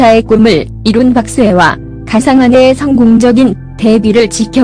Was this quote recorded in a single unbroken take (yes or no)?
no